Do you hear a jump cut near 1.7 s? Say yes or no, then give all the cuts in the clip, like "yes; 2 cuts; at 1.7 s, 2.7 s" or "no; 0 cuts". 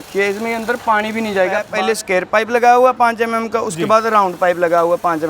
yes; 1 cut; at 1.7 s